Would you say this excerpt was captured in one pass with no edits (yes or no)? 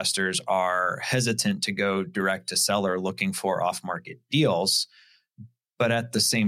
yes